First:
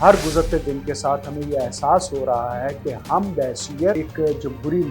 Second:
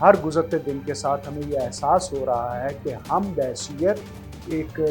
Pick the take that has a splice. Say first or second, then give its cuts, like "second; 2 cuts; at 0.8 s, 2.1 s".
first; 1 cut; at 4.0 s